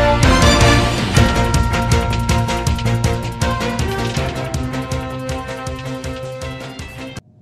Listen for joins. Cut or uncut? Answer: uncut